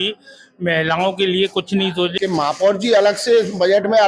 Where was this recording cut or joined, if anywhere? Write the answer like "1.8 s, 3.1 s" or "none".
2.1 s